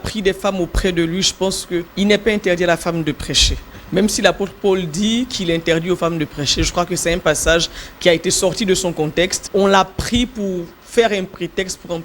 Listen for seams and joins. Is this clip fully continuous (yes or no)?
no